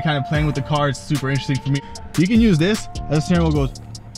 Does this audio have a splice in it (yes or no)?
yes